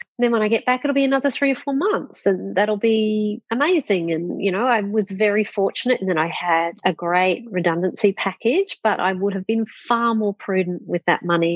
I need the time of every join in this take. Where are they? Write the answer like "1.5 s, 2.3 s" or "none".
3.4 s, 6.7 s